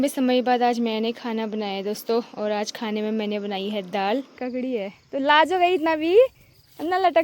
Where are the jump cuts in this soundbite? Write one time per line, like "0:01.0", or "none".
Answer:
0:04.3